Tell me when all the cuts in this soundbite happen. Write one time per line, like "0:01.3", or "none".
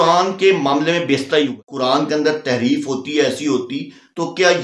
0:01.6